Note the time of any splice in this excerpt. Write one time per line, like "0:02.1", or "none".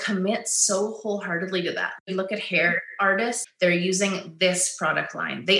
0:02.0
0:03.4